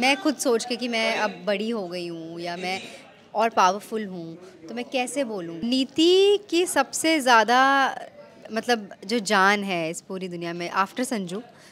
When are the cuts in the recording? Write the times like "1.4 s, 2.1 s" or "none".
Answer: 5.7 s